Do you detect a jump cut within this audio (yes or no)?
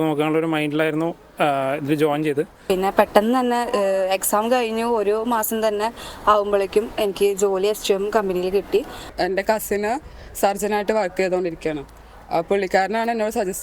yes